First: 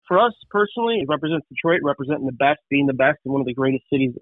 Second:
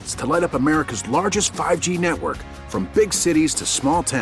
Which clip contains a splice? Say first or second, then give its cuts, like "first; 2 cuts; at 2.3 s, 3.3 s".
first; 1 cut; at 1.0 s